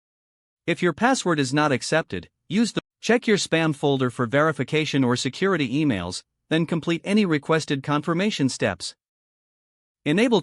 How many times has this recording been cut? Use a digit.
1